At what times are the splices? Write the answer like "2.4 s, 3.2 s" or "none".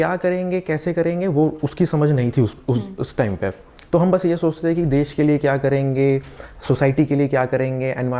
none

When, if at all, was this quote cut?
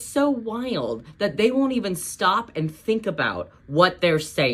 none

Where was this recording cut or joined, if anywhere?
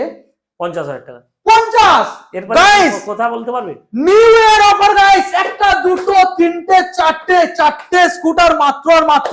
none

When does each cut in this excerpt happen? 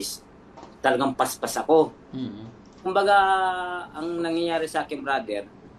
none

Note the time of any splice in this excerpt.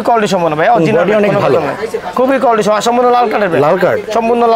none

